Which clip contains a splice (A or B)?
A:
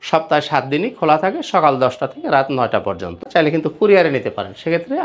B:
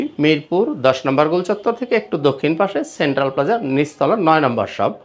A